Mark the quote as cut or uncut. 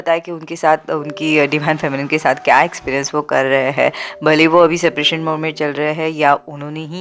uncut